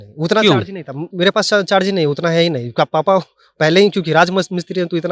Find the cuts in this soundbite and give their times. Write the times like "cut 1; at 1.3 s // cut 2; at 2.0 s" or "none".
none